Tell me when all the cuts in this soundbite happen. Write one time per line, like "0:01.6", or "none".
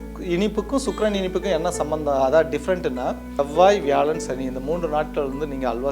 0:03.3